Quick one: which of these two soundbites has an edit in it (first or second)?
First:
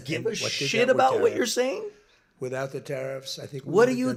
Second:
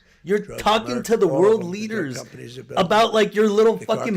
second